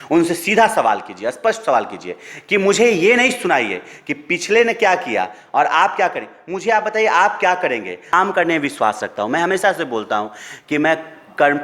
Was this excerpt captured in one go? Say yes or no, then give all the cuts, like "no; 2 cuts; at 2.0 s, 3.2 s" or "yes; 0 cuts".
no; 1 cut; at 8.1 s